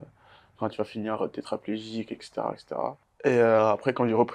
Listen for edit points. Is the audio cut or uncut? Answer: cut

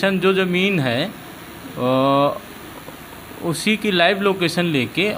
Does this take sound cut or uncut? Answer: uncut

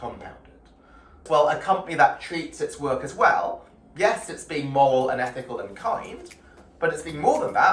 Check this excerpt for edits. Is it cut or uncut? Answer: cut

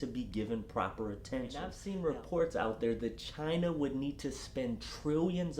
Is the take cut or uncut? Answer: cut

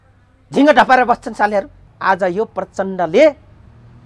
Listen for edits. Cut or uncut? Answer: cut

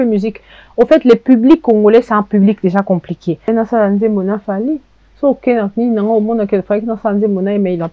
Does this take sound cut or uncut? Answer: cut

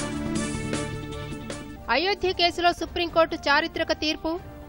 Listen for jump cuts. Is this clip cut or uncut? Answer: cut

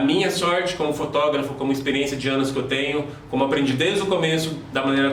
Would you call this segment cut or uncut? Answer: uncut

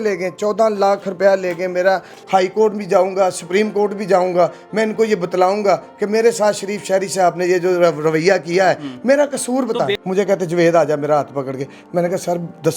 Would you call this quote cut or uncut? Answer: cut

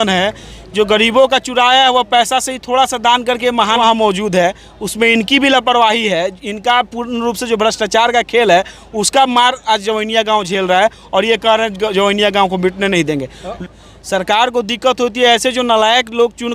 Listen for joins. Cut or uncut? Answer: cut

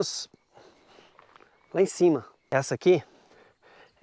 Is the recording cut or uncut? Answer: cut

